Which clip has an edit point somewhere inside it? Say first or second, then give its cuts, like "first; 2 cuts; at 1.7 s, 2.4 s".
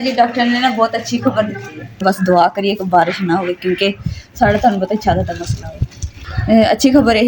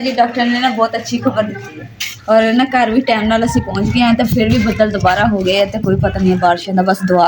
first; 1 cut; at 2.0 s